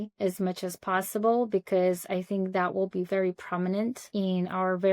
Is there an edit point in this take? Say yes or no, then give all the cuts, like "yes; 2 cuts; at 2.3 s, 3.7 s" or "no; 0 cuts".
yes; 1 cut; at 4.0 s